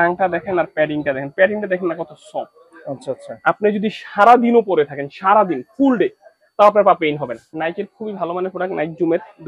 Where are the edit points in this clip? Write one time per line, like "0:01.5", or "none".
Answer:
0:07.4